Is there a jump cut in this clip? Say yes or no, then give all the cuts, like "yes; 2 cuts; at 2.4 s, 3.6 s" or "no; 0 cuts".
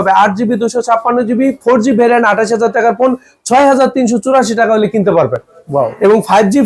no; 0 cuts